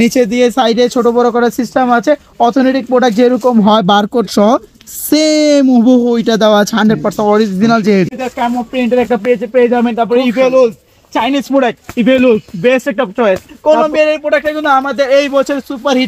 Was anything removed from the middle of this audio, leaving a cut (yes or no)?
yes